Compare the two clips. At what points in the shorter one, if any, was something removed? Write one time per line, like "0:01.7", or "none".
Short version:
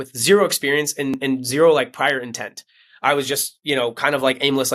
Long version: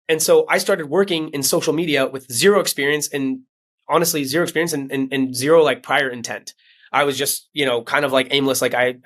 0:01.2